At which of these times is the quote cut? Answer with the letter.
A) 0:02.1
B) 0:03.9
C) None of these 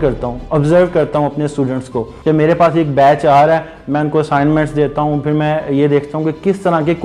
A